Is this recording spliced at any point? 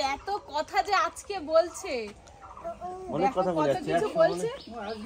no; 0 cuts

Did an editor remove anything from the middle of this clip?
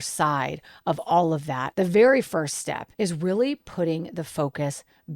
yes; 2 cuts; at 1.7 s, 2.8 s

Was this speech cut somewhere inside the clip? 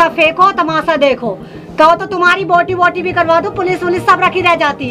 no; 0 cuts

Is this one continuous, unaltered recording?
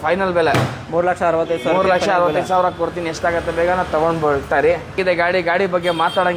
no; 1 cut; at 5.0 s

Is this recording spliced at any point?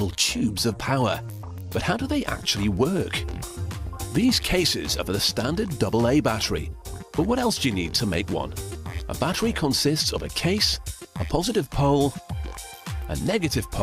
no; 0 cuts

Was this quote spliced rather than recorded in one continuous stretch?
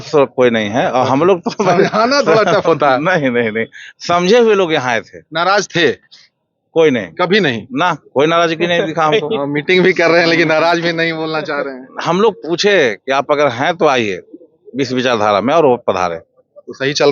no; 0 cuts

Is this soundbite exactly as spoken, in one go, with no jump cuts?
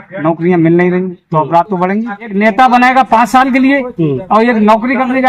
no; 1 cut; at 2.3 s

